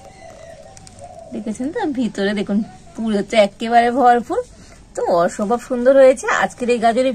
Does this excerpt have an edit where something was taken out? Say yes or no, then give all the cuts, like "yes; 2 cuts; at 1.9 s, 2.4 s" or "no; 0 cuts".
no; 0 cuts